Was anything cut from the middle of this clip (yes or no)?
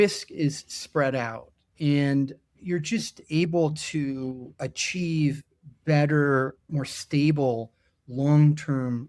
yes